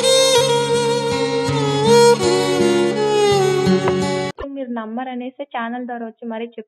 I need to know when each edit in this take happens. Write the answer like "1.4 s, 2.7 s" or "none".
4.4 s